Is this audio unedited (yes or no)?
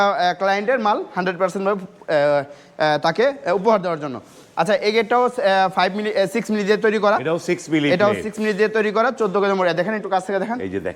yes